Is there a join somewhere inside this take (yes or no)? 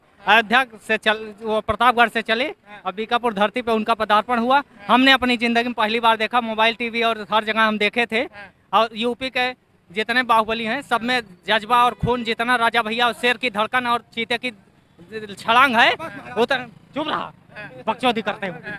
no